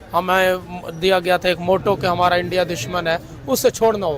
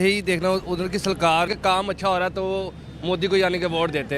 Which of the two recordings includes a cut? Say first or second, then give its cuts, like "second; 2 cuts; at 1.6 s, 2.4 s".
second; 1 cut; at 1.5 s